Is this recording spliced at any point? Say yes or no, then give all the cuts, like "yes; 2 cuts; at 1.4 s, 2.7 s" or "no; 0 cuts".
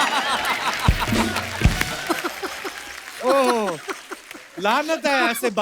no; 0 cuts